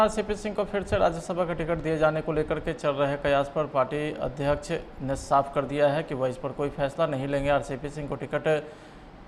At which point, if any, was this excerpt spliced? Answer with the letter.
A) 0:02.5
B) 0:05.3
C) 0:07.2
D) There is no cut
D